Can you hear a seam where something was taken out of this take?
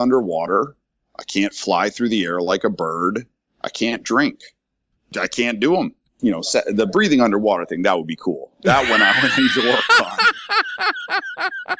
yes; 2 cuts; at 4.9 s, 6.0 s

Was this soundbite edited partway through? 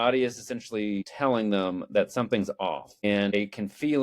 yes; 2 cuts; at 1.1 s, 3.3 s

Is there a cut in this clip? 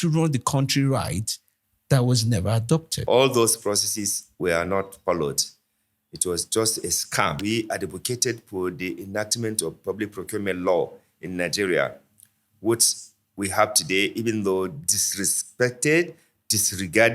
yes; 2 cuts; at 2.9 s, 7.4 s

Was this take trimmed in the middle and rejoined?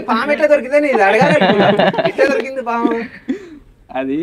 no; 0 cuts

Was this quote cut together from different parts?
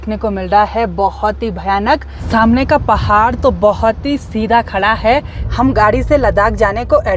yes; 2 cuts; at 2.1 s, 5.4 s

